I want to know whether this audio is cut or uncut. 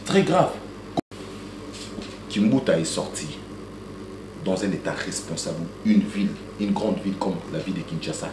cut